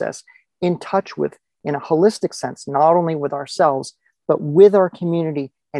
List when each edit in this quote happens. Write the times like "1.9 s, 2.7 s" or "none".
none